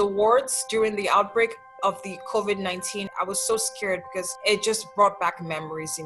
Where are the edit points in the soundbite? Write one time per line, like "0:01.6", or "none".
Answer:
0:03.1
0:04.3